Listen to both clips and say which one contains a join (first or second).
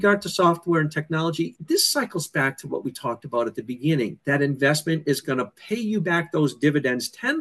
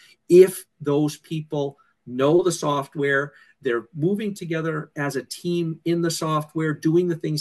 first